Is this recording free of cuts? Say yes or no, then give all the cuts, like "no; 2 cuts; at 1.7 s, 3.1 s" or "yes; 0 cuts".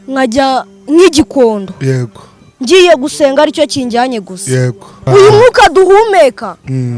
no; 1 cut; at 5.0 s